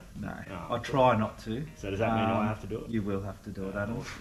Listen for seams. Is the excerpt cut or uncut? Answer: uncut